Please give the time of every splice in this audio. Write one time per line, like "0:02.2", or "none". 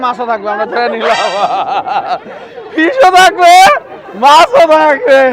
none